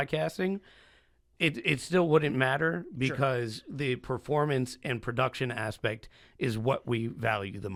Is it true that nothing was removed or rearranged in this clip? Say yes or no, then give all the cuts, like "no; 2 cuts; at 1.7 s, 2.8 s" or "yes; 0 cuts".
yes; 0 cuts